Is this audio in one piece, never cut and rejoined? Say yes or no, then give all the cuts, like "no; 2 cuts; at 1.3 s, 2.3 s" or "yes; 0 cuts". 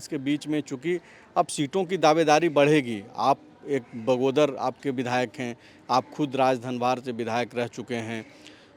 yes; 0 cuts